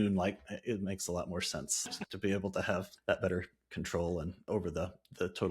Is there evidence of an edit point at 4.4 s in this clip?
yes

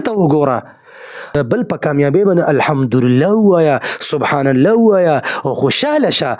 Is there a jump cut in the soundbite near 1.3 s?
yes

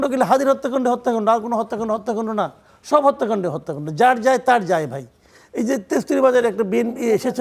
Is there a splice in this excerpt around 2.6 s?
no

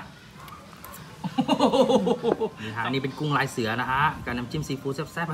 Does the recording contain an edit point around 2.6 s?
yes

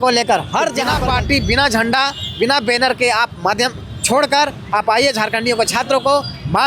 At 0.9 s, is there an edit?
yes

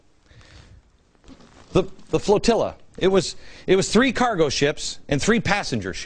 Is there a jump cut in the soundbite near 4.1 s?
yes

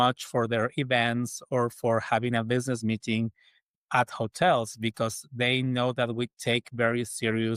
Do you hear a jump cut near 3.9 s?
no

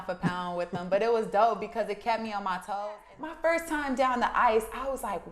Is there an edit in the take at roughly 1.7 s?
no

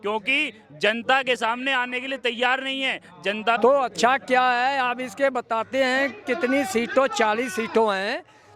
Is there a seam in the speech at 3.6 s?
yes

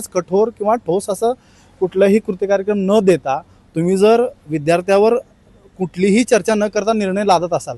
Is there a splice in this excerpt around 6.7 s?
no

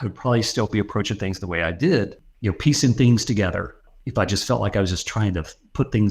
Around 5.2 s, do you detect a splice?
no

